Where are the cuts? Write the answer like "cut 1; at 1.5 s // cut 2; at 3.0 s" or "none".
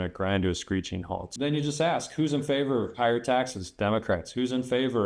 cut 1; at 1.3 s